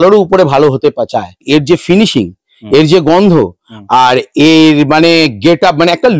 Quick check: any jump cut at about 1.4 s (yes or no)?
yes